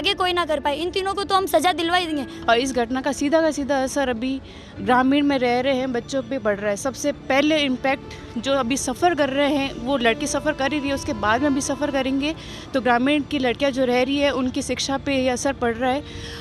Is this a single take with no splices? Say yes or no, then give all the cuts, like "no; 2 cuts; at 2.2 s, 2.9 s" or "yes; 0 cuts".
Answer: no; 1 cut; at 2.3 s